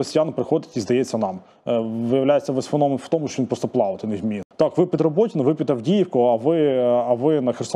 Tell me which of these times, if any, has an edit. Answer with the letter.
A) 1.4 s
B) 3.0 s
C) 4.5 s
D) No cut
C